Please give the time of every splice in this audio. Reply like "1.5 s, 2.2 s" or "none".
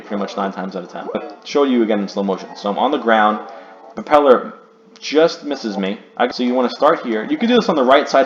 1.1 s, 6.3 s